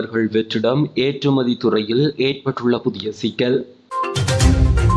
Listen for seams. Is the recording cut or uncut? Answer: cut